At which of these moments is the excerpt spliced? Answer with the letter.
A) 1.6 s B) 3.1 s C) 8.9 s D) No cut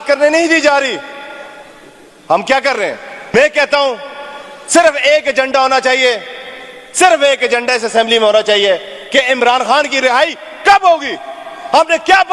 B